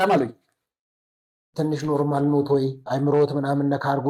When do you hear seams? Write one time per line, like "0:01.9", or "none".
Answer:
0:01.5
0:02.8